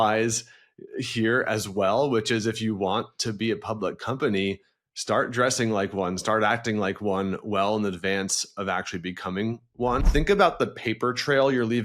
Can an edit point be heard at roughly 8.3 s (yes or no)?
no